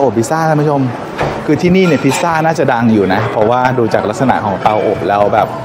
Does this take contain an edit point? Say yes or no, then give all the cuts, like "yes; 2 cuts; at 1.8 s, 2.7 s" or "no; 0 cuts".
no; 0 cuts